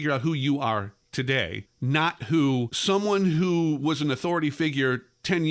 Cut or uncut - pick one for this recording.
cut